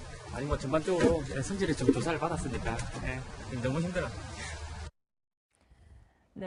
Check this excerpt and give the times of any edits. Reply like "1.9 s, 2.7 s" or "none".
none